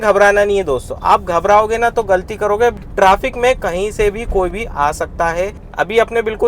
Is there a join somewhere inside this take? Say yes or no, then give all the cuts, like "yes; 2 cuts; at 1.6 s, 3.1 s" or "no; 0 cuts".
yes; 2 cuts; at 2.8 s, 5.6 s